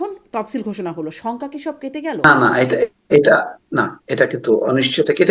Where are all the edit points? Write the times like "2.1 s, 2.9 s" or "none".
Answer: 2.2 s